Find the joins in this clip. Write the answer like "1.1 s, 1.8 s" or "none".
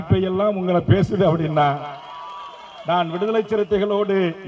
none

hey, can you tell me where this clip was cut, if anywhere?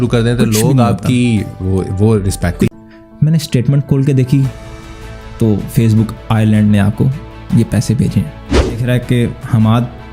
2.7 s, 8.8 s

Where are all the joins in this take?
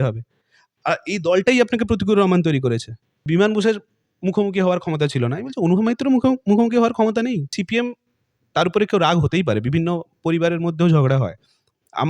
3.3 s, 7.5 s

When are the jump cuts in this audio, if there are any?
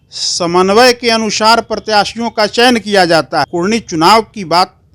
3.5 s

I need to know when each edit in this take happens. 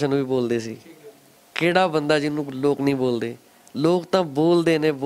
none

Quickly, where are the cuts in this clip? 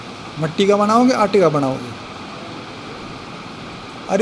none

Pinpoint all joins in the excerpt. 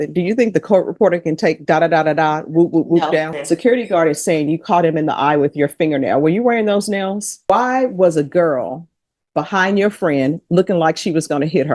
3.4 s, 7.4 s

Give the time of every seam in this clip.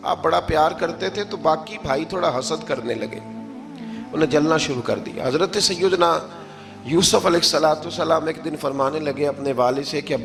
none

